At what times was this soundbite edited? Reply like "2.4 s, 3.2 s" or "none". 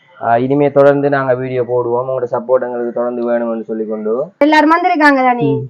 4.4 s